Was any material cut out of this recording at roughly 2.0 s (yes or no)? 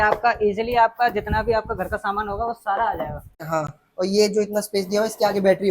no